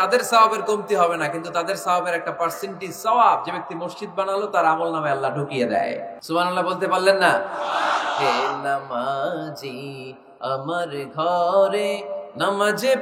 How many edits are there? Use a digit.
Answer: 1